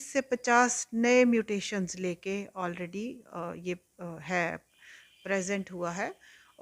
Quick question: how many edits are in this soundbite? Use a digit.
0